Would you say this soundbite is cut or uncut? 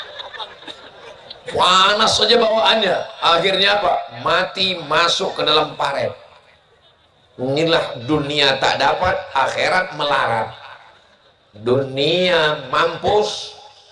uncut